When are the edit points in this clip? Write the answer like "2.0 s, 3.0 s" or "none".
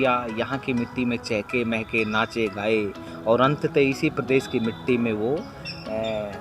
none